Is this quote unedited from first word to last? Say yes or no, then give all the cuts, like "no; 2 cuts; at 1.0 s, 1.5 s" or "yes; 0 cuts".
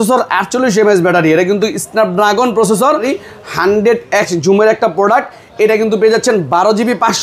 no; 1 cut; at 3.1 s